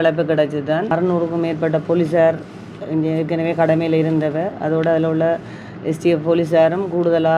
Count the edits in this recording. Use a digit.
1